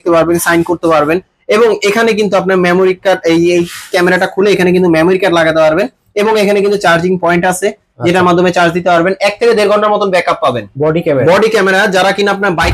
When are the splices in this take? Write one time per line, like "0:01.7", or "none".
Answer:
0:10.7